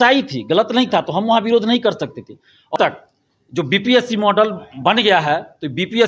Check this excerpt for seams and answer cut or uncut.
cut